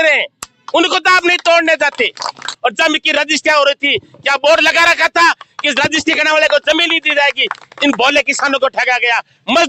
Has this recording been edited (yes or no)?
yes